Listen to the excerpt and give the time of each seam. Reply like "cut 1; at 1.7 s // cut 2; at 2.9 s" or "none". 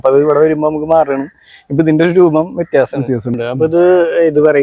cut 1; at 3.3 s